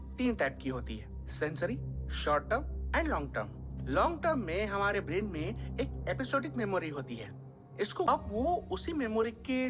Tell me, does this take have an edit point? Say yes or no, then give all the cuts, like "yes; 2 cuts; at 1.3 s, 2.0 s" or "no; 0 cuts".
yes; 1 cut; at 8.1 s